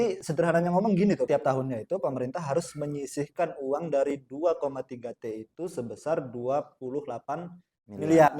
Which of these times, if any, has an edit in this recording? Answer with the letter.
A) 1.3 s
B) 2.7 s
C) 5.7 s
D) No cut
A